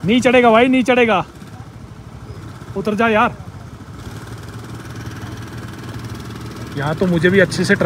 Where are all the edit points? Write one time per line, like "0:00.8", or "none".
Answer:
none